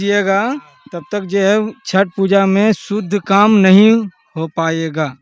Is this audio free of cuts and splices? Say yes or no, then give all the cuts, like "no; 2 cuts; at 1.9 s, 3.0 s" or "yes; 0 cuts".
yes; 0 cuts